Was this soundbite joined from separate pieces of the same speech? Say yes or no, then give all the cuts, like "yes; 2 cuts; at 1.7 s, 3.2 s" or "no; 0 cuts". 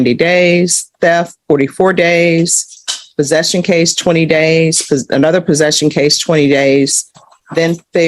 no; 0 cuts